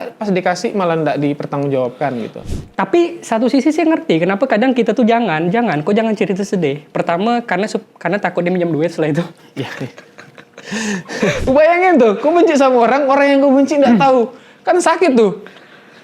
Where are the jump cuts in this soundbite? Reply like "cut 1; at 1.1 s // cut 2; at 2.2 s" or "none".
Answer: cut 1; at 2.5 s // cut 2; at 11.4 s